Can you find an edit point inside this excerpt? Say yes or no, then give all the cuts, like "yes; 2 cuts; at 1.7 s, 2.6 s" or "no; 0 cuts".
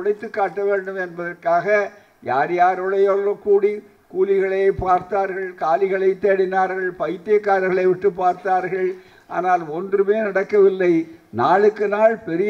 no; 0 cuts